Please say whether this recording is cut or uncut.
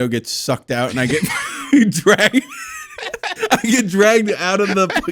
uncut